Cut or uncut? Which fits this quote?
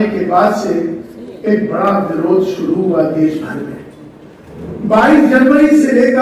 uncut